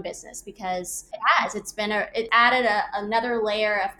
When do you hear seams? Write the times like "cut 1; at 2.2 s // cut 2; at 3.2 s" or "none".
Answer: cut 1; at 1.0 s // cut 2; at 2.3 s